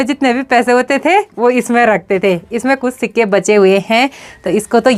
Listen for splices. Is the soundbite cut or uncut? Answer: uncut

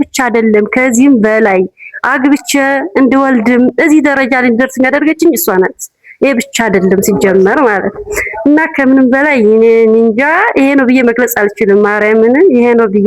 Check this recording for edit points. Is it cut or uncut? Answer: uncut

